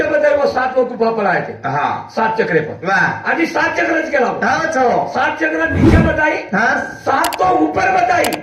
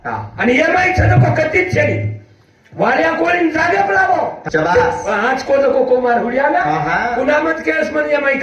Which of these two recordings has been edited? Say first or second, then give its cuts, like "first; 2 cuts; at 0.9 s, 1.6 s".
second; 1 cut; at 4.4 s